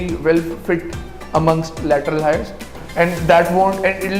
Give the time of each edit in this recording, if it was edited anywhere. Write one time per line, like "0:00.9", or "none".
0:02.6